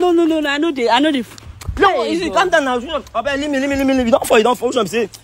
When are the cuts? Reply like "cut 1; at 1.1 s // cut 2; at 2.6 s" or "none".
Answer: none